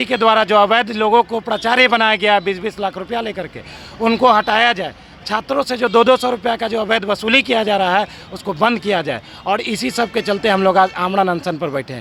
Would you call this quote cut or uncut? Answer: uncut